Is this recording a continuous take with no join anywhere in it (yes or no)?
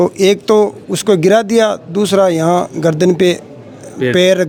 yes